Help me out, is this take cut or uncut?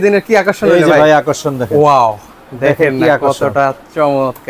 uncut